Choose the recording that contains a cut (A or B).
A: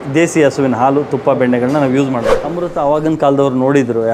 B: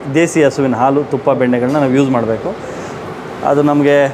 A